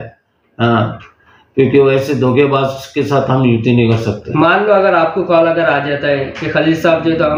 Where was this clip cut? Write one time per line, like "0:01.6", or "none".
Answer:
none